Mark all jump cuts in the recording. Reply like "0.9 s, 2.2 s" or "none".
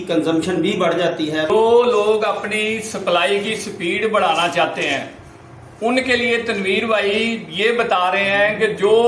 1.5 s